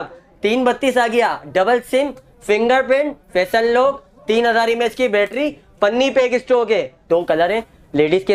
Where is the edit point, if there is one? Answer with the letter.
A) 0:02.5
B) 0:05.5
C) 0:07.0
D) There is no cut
C